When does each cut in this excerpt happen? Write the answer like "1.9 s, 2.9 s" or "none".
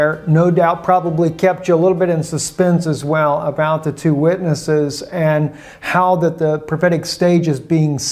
5.3 s